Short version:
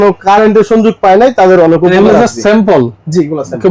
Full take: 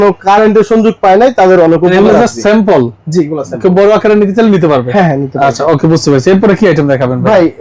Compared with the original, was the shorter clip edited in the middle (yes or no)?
no